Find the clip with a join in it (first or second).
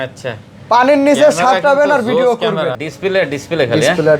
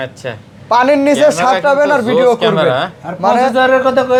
first